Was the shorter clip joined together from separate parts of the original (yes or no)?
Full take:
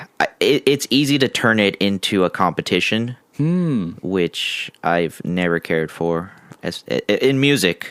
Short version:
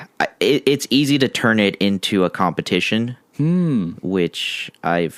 no